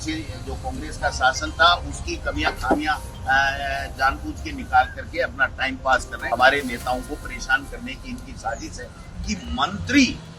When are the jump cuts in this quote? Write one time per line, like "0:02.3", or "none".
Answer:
0:06.1
0:09.1